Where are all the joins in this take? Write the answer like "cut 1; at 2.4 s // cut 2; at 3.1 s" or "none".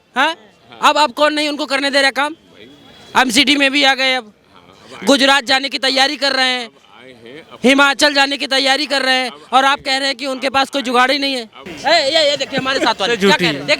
cut 1; at 11.6 s

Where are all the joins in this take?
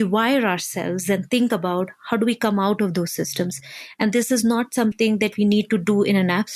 none

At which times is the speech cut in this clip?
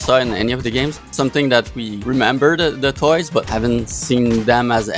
cut 1; at 1.1 s // cut 2; at 1.9 s // cut 3; at 3.5 s

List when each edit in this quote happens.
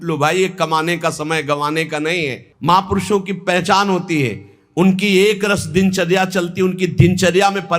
cut 1; at 2.5 s

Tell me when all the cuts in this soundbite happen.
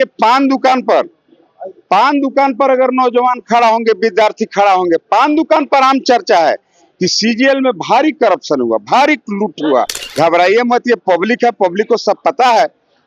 cut 1; at 10.0 s

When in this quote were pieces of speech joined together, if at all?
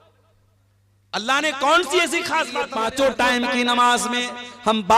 cut 1; at 2.7 s

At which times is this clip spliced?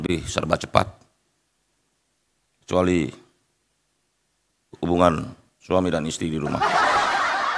cut 1; at 6.6 s

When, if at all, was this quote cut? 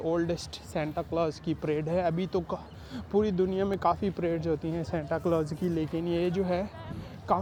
none

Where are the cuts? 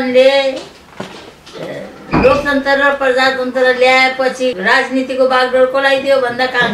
cut 1; at 4.6 s

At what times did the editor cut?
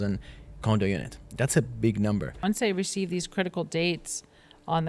cut 1; at 2.3 s

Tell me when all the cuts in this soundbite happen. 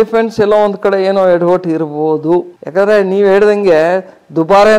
none

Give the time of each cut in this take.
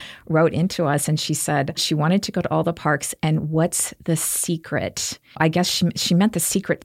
cut 1; at 1.8 s

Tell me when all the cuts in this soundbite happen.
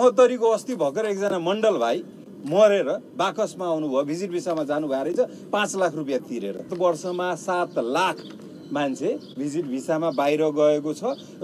cut 1; at 6.7 s

